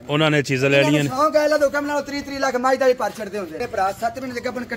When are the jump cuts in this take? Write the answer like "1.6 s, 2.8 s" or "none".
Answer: 3.6 s